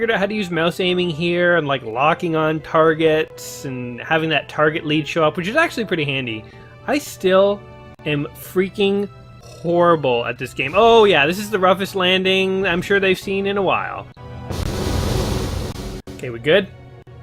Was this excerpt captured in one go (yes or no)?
yes